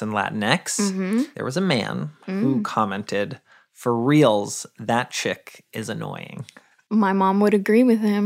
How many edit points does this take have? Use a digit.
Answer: 1